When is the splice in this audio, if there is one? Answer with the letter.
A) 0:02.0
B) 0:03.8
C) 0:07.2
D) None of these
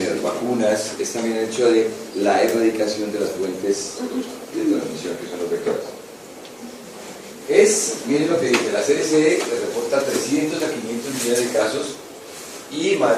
B